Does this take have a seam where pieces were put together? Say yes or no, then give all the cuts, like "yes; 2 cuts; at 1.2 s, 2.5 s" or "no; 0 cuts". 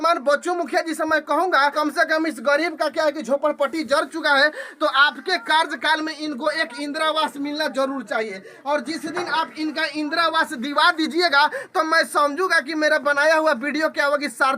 yes; 1 cut; at 1.7 s